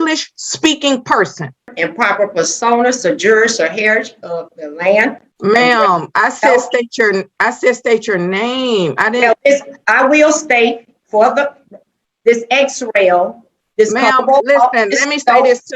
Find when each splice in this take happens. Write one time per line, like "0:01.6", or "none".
0:01.6
0:05.3